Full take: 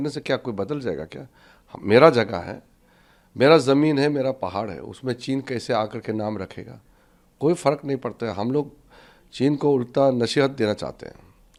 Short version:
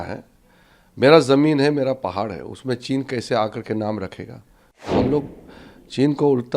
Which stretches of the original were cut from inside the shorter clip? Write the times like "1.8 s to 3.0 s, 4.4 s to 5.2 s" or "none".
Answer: 7.3 s to 8.3 s